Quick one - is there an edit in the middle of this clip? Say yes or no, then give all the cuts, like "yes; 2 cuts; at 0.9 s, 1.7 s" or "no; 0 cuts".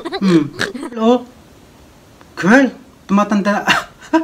yes; 1 cut; at 1.0 s